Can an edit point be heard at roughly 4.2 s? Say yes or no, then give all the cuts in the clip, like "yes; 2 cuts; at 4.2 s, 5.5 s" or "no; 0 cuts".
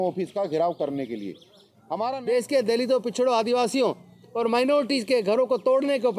no; 1 cut; at 2.0 s